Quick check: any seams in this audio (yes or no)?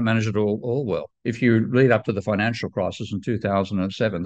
yes